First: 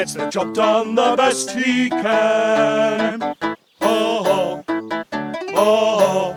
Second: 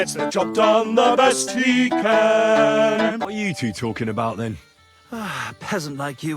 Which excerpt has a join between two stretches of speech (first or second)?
second